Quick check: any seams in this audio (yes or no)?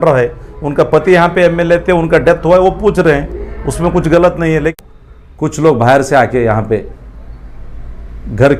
yes